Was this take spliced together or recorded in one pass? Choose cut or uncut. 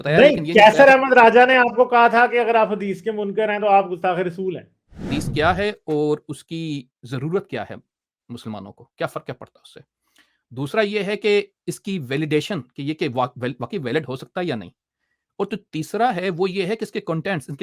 cut